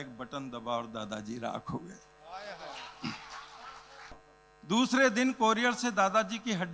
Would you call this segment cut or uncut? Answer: cut